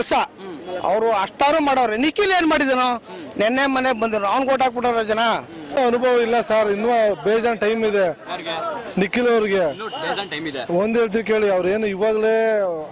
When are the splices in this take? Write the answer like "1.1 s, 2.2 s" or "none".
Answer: 5.8 s